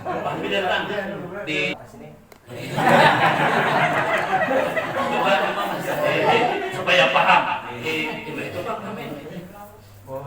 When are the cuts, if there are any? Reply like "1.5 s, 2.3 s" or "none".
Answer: 1.7 s